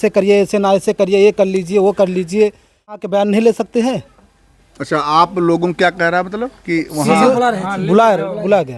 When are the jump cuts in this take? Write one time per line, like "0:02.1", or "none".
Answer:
0:03.0